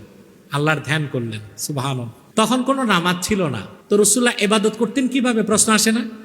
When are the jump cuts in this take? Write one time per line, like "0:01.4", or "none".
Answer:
0:02.2
0:03.7